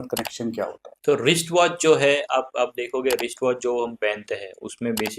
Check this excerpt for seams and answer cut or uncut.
cut